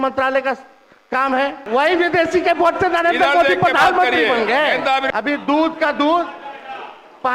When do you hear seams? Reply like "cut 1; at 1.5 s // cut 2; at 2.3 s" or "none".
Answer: cut 1; at 1.6 s // cut 2; at 5.1 s